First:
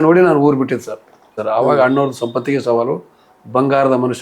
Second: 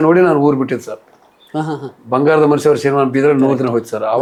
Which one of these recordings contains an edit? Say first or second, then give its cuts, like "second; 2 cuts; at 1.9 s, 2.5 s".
first; 1 cut; at 1.4 s